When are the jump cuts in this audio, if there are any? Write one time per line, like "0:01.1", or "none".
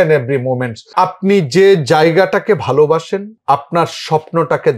0:00.9
0:03.3